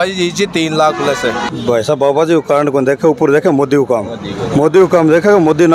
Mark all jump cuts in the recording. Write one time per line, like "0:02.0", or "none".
0:01.5